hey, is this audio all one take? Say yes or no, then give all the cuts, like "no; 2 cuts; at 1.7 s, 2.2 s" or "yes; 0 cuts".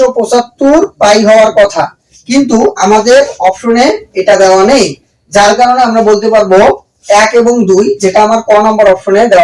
yes; 0 cuts